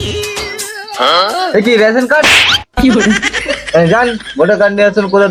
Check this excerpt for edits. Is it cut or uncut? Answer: uncut